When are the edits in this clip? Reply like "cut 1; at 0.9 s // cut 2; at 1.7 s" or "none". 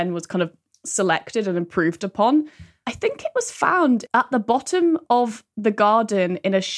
cut 1; at 4.0 s